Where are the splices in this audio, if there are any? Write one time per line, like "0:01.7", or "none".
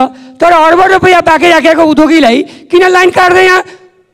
none